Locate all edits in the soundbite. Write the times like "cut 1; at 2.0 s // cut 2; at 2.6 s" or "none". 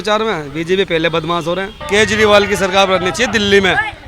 cut 1; at 1.7 s